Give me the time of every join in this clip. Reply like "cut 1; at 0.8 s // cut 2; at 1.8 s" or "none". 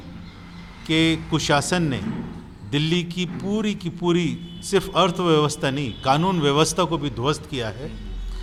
none